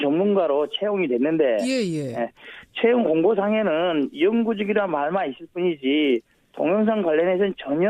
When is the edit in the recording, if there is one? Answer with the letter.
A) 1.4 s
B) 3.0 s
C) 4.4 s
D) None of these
B